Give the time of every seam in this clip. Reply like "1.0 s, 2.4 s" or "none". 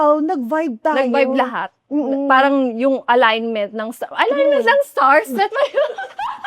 none